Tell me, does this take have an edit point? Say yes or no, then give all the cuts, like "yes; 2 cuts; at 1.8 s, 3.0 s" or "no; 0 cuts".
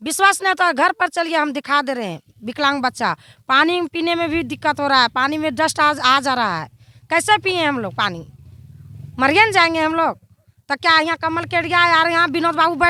no; 0 cuts